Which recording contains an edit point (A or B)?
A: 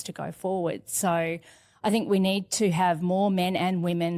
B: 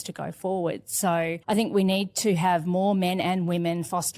B